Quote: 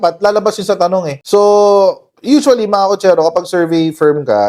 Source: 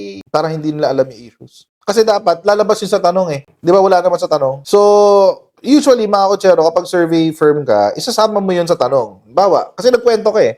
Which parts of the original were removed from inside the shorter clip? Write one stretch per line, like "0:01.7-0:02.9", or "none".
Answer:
0:03.4-0:04.6